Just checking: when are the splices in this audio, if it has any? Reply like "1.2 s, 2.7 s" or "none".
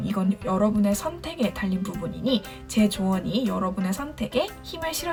none